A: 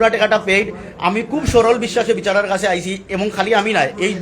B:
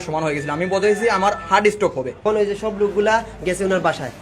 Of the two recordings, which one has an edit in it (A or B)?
B